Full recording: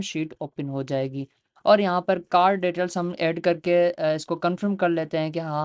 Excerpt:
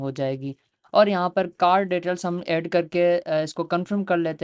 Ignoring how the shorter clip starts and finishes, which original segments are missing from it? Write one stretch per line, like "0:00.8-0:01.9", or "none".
none